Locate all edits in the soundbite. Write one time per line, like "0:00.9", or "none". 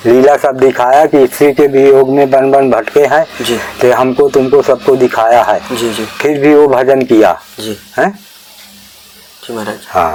none